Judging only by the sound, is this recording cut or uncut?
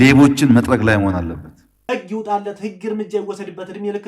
cut